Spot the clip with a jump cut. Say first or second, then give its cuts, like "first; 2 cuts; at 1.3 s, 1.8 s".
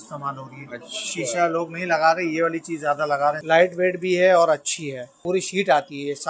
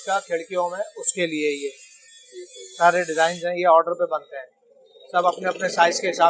first; 2 cuts; at 3.4 s, 5.1 s